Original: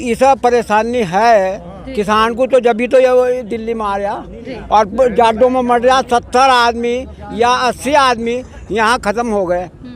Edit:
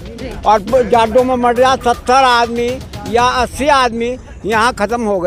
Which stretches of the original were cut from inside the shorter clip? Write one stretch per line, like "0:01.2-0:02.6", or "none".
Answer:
none